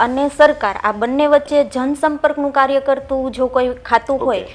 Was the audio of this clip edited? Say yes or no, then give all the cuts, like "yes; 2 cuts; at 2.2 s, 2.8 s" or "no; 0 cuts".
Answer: no; 0 cuts